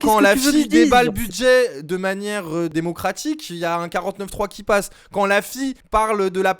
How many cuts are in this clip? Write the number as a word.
one